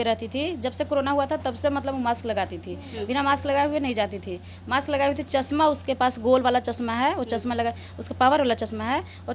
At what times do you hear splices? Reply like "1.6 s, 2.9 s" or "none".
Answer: none